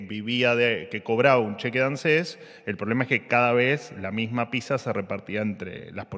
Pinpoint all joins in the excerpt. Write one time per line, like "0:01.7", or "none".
none